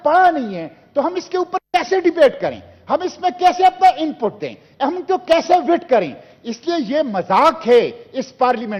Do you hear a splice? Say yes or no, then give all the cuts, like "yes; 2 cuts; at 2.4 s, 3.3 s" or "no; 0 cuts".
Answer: no; 0 cuts